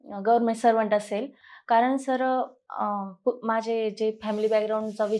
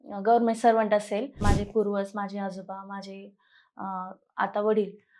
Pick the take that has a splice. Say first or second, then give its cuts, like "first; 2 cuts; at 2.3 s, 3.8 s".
second; 1 cut; at 1.4 s